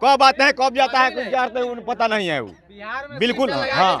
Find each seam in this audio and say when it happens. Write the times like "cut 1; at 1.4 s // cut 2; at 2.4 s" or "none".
none